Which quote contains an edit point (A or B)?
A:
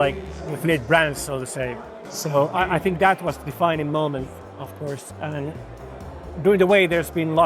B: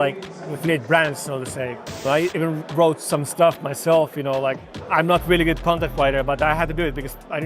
B